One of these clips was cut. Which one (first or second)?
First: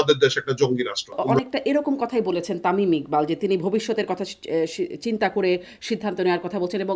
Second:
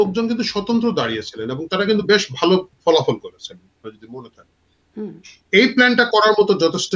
first